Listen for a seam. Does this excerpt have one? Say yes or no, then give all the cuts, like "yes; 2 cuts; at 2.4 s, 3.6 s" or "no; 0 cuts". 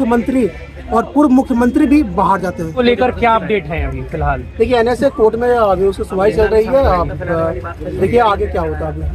yes; 1 cut; at 2.7 s